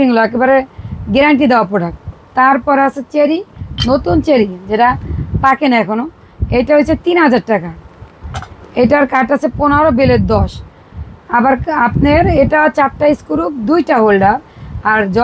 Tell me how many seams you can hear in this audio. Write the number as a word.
zero